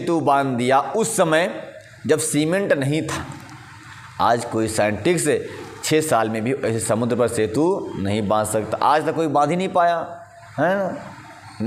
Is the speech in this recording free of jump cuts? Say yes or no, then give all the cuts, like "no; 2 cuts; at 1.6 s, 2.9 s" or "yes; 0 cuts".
yes; 0 cuts